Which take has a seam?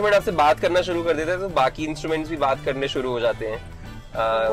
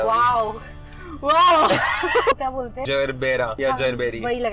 second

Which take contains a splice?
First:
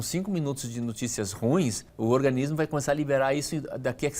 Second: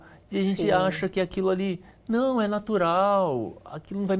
first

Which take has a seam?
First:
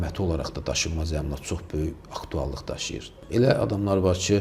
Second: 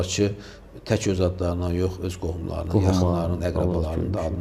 first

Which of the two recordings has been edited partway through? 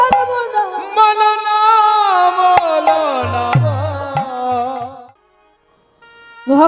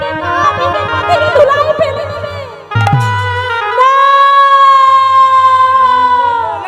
first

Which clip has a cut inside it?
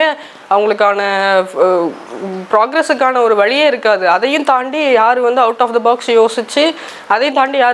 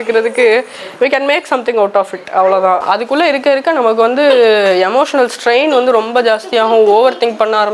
second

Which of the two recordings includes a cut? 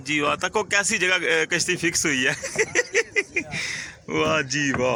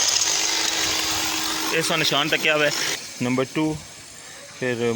second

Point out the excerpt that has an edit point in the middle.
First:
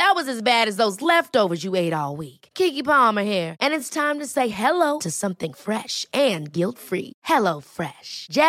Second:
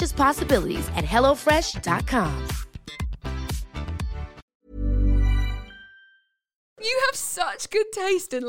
second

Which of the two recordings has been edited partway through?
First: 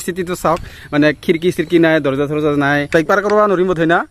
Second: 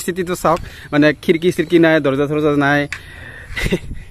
first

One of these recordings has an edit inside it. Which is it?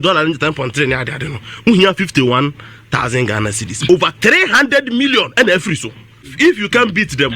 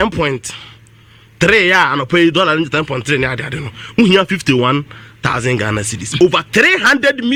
first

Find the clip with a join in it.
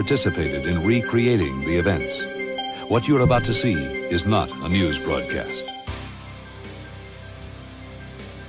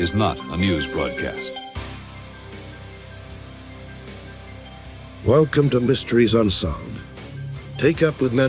first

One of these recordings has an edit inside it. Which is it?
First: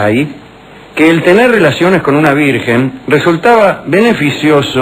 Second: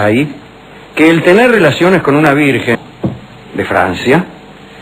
first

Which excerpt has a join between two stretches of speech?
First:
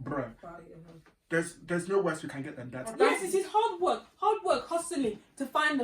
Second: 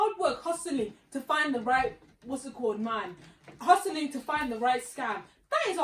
first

